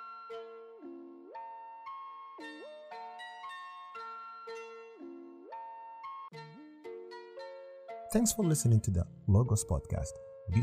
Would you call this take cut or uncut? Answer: cut